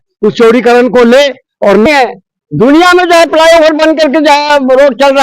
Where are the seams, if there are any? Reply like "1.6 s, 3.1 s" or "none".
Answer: 1.9 s